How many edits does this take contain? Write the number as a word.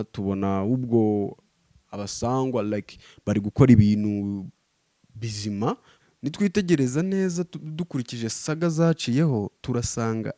one